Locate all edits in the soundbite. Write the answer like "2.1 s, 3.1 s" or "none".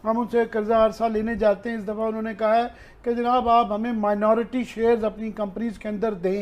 none